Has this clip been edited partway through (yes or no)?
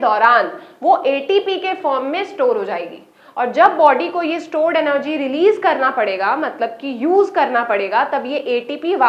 no